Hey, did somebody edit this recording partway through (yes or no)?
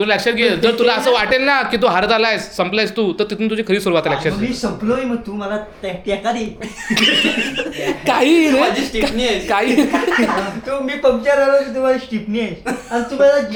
no